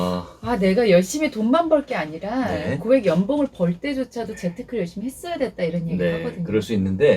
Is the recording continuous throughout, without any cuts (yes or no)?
yes